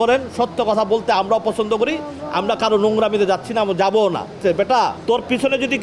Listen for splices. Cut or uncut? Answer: cut